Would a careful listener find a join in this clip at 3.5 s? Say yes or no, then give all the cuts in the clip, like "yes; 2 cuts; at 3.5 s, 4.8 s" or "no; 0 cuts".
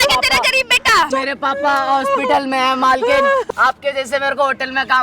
yes; 2 cuts; at 1.1 s, 3.5 s